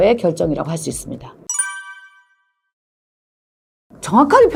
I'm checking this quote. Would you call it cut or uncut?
uncut